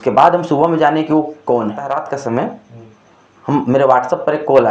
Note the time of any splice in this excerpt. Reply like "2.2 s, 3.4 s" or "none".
2.1 s